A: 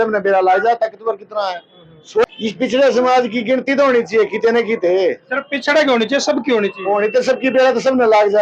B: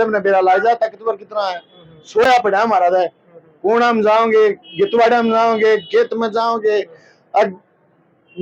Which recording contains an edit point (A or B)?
A